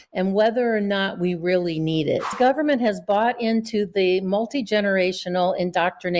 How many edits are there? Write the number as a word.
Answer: one